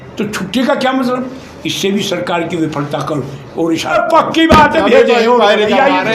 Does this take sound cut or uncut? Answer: cut